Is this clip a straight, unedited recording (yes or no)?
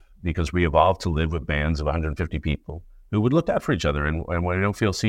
yes